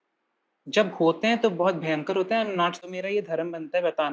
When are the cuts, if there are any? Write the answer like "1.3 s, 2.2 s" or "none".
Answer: 2.8 s